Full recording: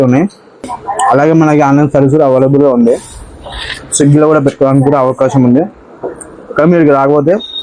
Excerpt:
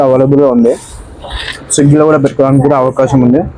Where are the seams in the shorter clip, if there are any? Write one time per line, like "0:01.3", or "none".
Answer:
none